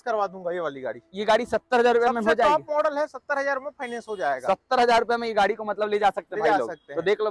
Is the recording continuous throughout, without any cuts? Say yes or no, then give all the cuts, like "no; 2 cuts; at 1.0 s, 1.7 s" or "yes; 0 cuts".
yes; 0 cuts